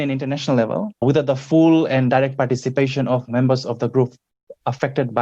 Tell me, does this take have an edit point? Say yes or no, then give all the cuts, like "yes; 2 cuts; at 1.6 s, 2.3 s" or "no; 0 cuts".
yes; 1 cut; at 1.0 s